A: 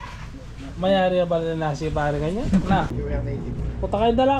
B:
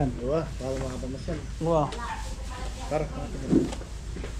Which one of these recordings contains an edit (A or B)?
A